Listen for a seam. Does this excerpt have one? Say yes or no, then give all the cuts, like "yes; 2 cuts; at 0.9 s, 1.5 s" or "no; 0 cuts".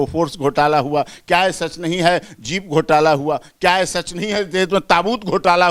no; 0 cuts